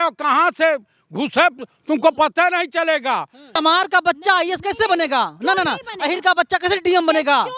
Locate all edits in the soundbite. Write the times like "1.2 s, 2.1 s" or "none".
3.4 s